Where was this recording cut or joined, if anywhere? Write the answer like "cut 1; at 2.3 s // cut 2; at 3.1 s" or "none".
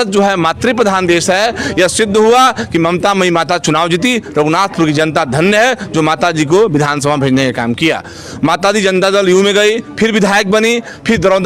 none